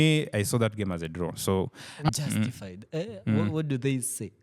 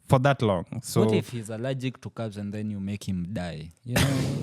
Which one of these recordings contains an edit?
first; 1 cut; at 2.1 s

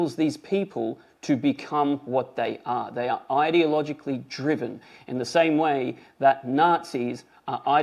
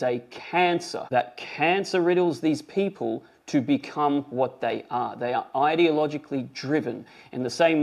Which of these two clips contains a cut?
second; 1 cut; at 1.0 s

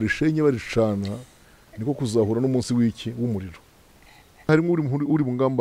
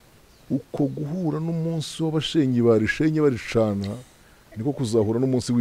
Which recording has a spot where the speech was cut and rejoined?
first; 1 cut; at 4.5 s

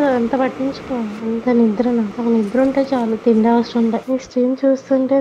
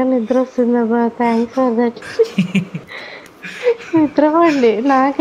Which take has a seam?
first; 3 cuts; at 1.1 s, 2.1 s, 4.0 s

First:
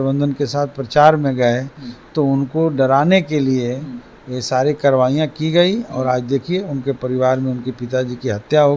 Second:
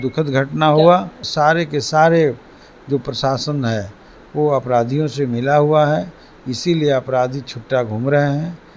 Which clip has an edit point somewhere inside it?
second; 1 cut; at 1.2 s

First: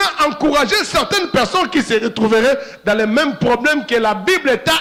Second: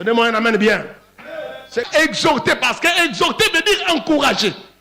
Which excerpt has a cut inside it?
second; 1 cut; at 1.9 s

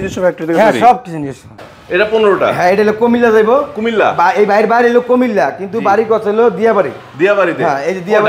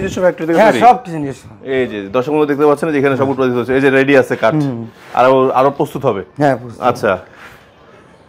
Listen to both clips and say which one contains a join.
first; 1 cut; at 1.5 s

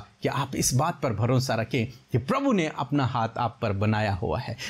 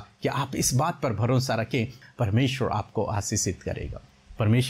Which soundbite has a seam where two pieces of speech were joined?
second; 1 cut; at 2.0 s

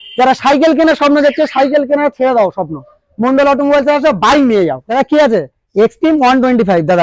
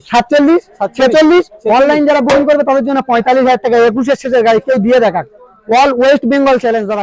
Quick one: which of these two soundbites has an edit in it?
first; 1 cut; at 4.8 s

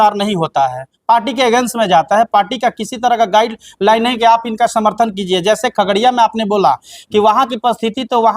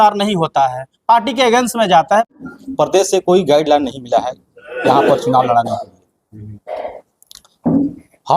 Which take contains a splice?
second; 1 cut; at 2.3 s

